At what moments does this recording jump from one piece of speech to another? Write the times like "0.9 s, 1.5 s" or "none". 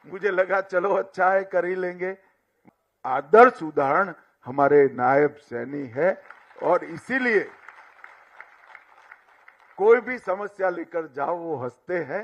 2.7 s